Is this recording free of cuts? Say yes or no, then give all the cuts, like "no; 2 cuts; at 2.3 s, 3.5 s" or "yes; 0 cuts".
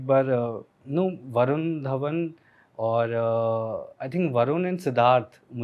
yes; 0 cuts